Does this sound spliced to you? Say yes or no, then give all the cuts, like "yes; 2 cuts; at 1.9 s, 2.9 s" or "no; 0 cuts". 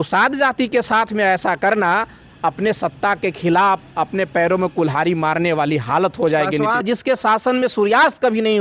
yes; 1 cut; at 6.8 s